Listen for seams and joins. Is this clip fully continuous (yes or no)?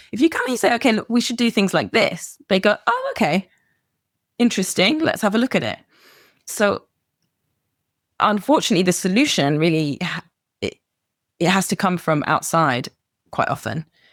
yes